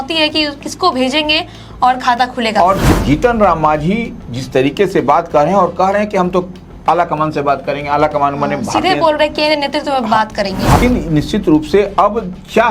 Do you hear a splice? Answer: yes; 2 cuts; at 2.9 s, 10.8 s

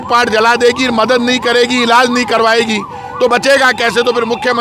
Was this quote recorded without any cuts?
yes; 0 cuts

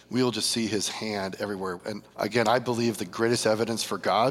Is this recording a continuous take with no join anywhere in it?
no; 1 cut; at 1.8 s

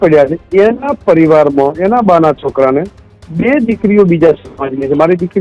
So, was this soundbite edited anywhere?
no; 0 cuts

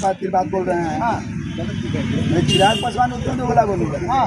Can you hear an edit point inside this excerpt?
no; 0 cuts

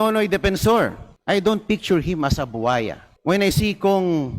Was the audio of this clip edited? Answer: yes; 2 cuts; at 1.1 s, 3.0 s

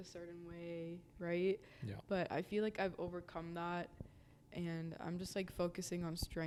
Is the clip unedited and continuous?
yes; 0 cuts

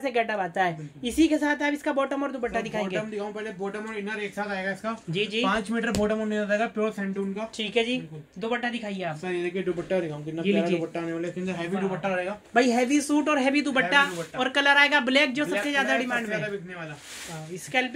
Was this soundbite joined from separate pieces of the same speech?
no; 0 cuts

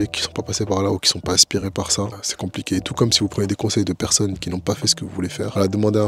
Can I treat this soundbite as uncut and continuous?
yes; 0 cuts

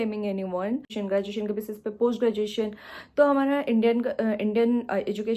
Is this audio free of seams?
no; 1 cut; at 0.9 s

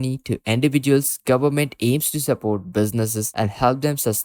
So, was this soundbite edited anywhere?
no; 0 cuts

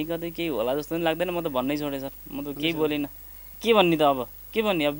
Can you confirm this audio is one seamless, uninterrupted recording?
yes; 0 cuts

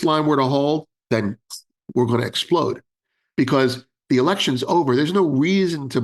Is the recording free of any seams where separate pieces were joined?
yes; 0 cuts

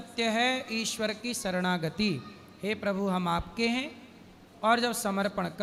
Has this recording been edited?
no; 0 cuts

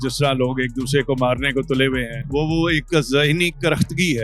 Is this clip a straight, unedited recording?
yes; 0 cuts

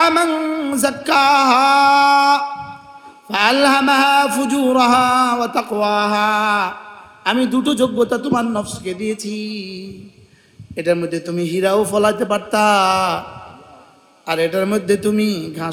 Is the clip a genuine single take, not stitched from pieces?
yes; 0 cuts

